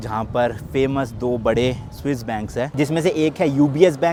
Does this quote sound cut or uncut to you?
uncut